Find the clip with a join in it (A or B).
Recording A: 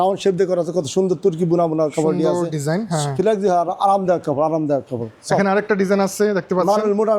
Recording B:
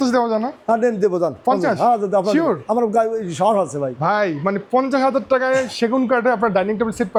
A